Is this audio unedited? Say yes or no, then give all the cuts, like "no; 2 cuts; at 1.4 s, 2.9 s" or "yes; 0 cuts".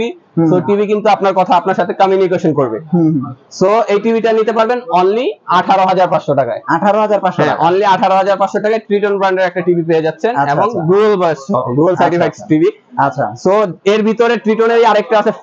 yes; 0 cuts